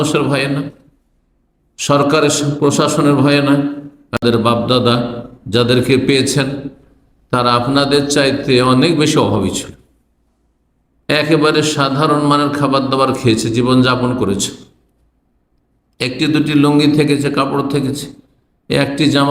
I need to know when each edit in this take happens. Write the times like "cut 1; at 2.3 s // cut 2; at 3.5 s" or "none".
cut 1; at 4.2 s